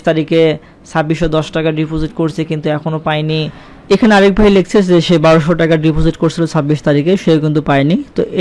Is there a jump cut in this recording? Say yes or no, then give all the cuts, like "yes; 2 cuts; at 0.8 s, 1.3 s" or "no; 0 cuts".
no; 0 cuts